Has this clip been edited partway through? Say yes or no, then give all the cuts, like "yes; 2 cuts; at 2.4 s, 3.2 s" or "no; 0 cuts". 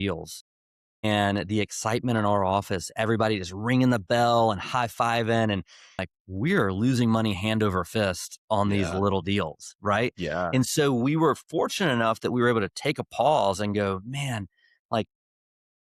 yes; 1 cut; at 6.1 s